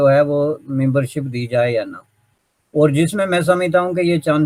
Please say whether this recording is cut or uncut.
uncut